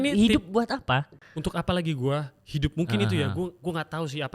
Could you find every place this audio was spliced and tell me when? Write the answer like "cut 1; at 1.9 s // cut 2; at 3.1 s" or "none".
cut 1; at 1.2 s